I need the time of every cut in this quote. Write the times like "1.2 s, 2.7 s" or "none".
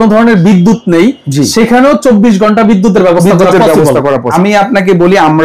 4.3 s